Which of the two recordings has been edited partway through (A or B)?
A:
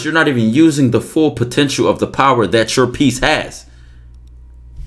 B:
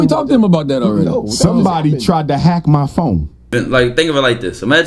B